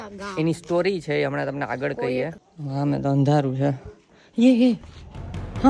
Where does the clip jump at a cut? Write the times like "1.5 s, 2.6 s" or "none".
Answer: 2.4 s